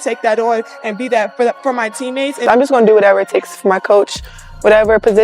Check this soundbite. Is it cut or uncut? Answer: cut